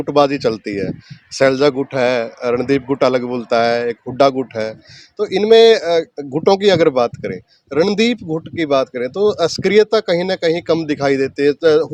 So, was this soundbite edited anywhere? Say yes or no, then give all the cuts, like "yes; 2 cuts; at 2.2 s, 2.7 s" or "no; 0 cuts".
no; 0 cuts